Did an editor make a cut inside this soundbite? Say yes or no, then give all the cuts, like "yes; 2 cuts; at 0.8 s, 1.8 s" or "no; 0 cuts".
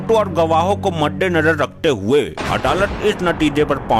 no; 0 cuts